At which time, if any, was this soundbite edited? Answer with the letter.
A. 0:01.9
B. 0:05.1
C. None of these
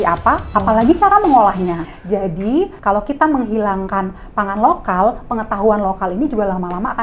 A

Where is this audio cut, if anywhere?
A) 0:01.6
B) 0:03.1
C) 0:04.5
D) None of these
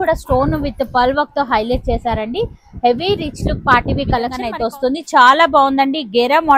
C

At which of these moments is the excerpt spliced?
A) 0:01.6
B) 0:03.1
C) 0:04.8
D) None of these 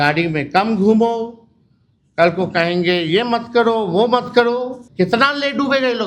C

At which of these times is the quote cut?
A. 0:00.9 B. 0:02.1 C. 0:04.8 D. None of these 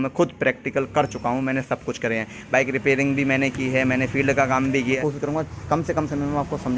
C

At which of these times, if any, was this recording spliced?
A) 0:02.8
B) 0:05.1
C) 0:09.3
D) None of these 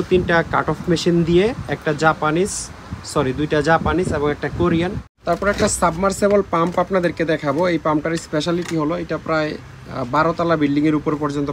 B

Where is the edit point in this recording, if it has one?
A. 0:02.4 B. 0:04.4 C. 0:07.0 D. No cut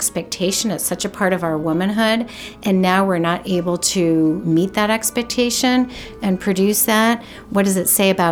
B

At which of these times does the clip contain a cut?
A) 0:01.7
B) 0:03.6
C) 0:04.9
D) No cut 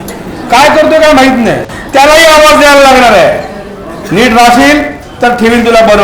A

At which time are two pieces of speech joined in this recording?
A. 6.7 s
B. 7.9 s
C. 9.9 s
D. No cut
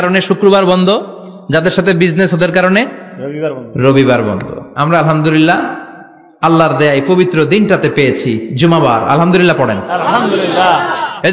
D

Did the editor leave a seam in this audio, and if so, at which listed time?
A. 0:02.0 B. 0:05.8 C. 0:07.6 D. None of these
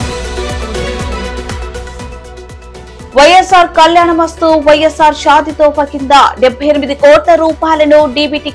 A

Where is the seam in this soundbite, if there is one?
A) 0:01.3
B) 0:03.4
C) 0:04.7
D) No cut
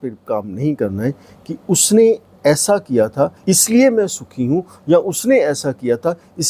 B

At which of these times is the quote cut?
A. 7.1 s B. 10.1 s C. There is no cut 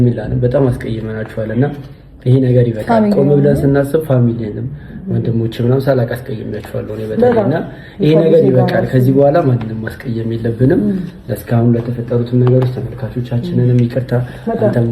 C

